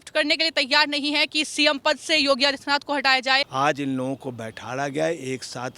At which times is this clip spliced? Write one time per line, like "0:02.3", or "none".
0:03.5